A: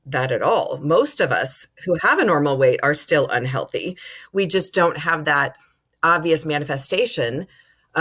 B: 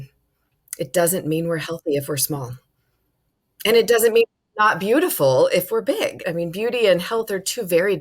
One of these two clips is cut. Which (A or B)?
B